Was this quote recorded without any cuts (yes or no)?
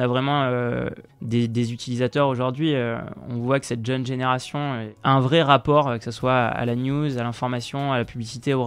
no